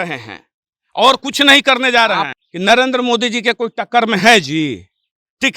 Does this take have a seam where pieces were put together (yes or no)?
yes